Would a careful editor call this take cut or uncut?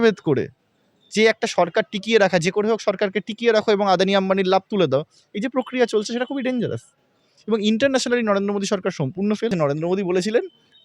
cut